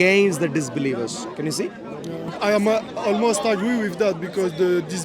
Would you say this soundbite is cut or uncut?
cut